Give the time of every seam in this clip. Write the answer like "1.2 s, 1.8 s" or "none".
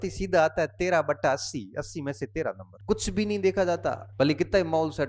2.7 s, 4.0 s